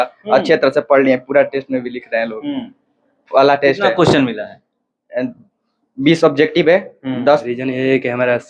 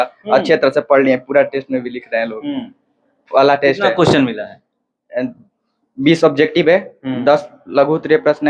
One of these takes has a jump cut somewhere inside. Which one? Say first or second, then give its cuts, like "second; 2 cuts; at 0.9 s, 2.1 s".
first; 1 cut; at 7.5 s